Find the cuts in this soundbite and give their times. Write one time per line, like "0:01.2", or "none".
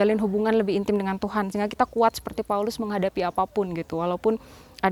none